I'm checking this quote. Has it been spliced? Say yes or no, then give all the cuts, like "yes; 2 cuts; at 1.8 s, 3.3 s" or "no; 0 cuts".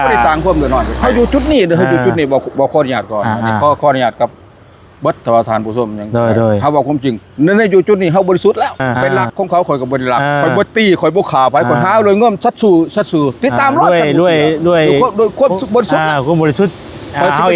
yes; 2 cuts; at 1.0 s, 8.9 s